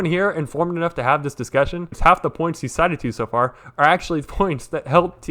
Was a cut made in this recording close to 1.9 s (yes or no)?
yes